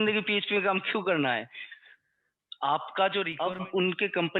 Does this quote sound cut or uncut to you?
cut